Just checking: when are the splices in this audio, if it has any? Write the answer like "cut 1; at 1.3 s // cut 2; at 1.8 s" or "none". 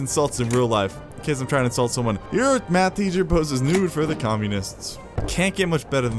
cut 1; at 2.2 s // cut 2; at 5.2 s